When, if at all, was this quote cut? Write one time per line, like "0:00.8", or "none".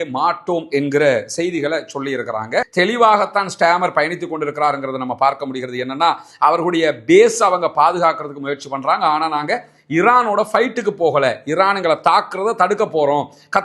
0:02.7